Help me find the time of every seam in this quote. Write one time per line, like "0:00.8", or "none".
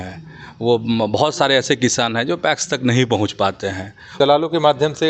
0:04.1